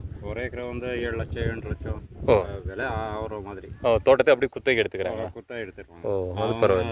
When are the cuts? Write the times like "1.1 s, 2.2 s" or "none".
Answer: none